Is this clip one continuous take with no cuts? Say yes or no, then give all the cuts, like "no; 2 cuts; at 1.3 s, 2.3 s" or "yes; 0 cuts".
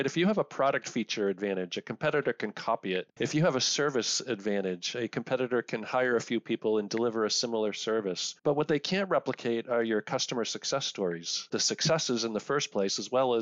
no; 3 cuts; at 3.1 s, 8.3 s, 11.5 s